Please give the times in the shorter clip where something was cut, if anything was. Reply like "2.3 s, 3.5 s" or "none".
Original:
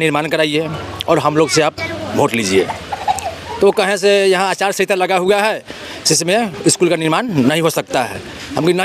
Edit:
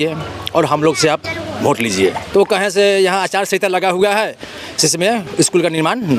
2.2 s